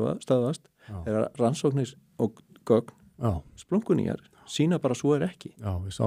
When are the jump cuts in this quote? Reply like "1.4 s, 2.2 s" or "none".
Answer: none